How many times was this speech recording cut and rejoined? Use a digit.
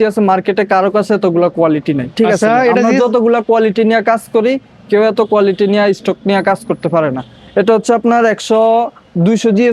0